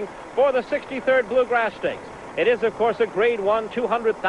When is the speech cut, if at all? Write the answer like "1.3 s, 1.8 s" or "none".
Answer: none